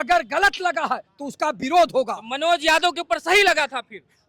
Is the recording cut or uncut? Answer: uncut